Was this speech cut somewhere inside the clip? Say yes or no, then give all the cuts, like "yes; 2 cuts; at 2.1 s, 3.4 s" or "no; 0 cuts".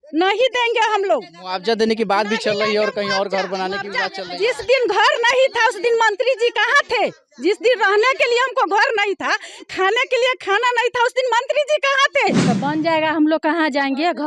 yes; 1 cut; at 12.4 s